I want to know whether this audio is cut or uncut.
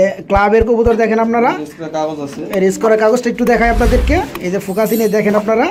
uncut